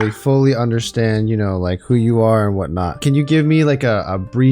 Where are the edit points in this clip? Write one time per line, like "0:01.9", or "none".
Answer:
0:03.0